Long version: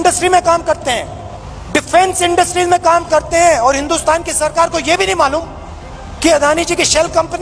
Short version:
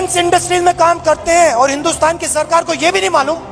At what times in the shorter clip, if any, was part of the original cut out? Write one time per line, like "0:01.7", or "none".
none